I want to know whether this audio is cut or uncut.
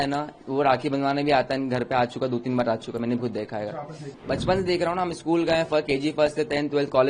cut